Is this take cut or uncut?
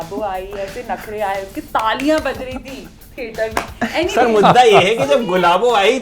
uncut